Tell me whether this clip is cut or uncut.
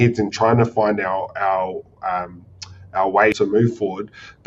cut